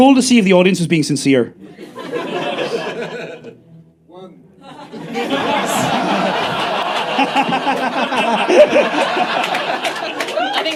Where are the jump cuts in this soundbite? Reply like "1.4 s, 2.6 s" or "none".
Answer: none